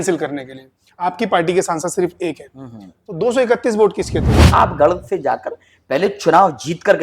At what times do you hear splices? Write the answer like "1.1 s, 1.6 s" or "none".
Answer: 4.5 s